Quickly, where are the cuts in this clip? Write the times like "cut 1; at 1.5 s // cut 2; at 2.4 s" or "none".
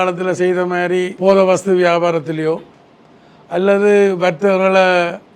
cut 1; at 1.1 s

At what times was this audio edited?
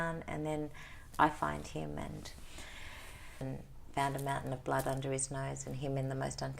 cut 1; at 3.4 s

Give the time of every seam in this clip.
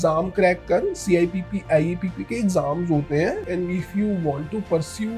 cut 1; at 3.4 s

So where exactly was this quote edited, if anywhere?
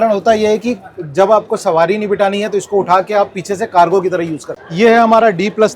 cut 1; at 4.5 s

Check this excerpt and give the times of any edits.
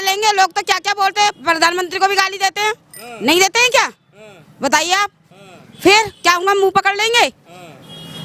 none

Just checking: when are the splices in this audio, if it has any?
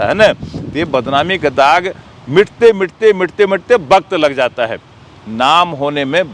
none

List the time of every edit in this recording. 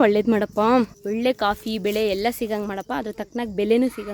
none

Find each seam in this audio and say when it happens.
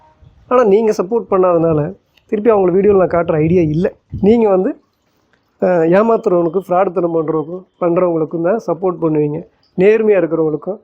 cut 1; at 4.1 s

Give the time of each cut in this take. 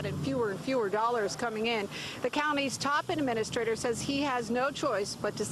none

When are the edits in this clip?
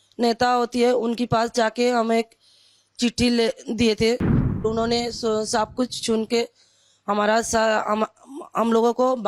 cut 1; at 4.6 s

